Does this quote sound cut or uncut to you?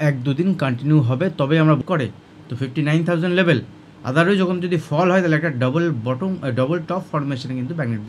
cut